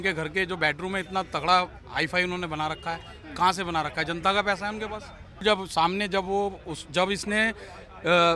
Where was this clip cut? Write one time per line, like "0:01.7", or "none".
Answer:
0:05.4

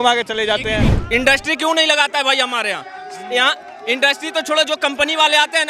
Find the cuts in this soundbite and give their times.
0:00.9

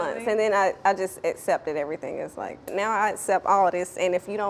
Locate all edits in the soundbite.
0:02.6

